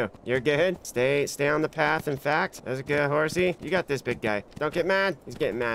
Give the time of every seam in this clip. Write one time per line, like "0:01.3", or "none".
none

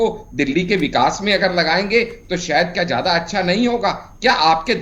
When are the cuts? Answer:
none

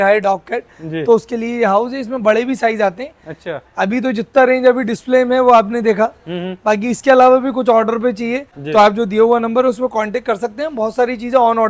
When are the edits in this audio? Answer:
none

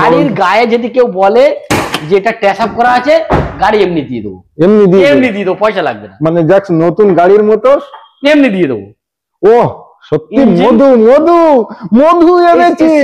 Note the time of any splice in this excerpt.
none

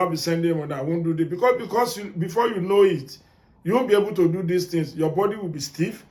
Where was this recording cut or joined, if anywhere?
none

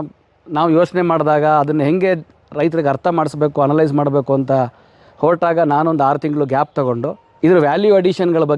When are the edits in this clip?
0:07.2

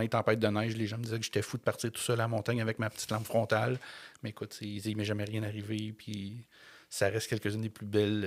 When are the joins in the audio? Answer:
none

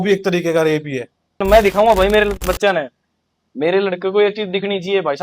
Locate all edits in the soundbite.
0:01.4

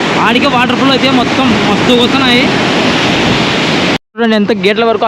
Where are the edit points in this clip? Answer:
0:04.0

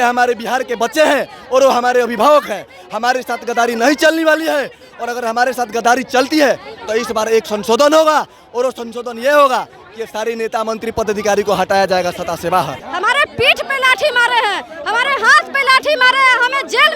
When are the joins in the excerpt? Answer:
0:12.8

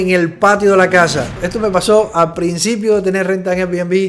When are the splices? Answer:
0:01.3

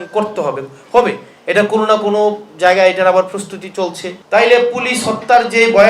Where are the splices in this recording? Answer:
0:04.1

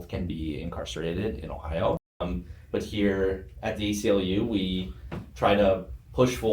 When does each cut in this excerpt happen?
0:02.2

